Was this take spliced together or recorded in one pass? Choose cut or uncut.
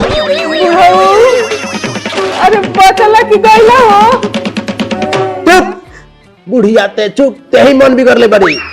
cut